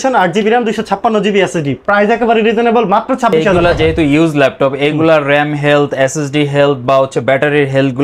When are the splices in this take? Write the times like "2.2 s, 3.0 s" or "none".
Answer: 3.5 s